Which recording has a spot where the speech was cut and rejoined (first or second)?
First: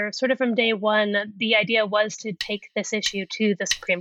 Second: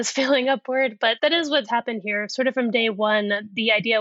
second